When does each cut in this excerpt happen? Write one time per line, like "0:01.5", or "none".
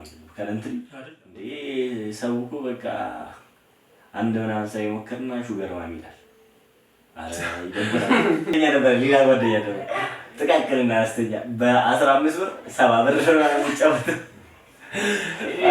0:00.9
0:08.5